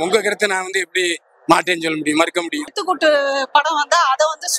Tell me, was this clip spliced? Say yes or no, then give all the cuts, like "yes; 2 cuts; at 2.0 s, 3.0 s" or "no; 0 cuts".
yes; 1 cut; at 2.8 s